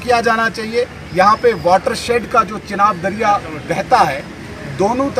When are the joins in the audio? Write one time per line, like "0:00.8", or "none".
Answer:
none